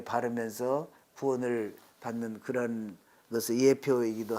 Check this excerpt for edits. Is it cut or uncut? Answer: uncut